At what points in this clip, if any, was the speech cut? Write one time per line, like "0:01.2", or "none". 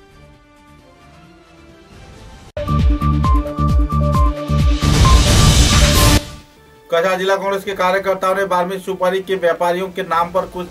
none